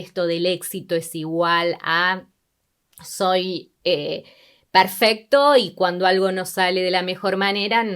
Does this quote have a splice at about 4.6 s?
no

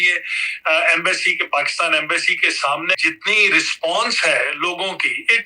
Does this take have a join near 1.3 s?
no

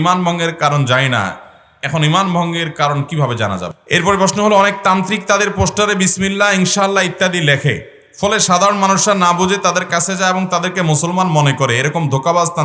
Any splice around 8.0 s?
no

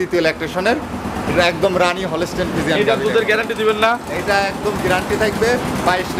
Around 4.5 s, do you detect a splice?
no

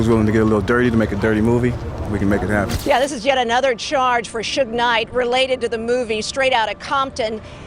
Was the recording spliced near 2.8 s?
yes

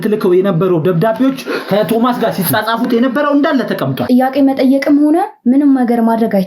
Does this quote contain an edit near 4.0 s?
yes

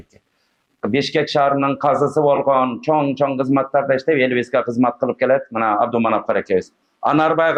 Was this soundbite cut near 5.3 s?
no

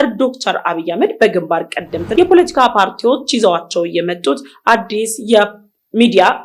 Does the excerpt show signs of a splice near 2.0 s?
yes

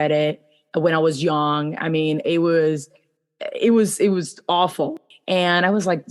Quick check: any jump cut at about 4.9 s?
yes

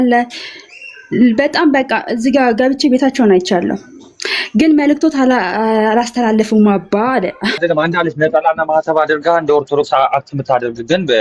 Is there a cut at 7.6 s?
yes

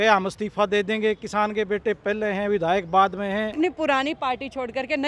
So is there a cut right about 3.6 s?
yes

